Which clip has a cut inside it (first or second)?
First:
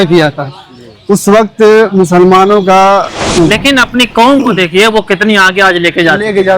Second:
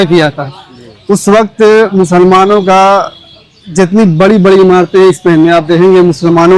first